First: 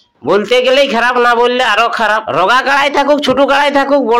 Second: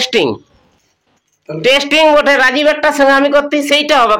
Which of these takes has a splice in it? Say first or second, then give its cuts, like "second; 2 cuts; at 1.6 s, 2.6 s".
first; 1 cut; at 2.3 s